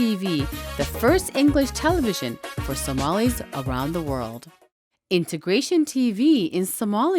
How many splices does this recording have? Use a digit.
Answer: 1